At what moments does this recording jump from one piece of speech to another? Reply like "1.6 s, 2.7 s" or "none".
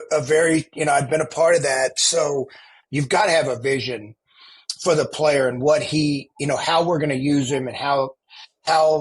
2.8 s